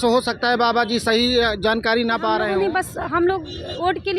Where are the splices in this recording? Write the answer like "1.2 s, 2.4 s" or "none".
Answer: 2.4 s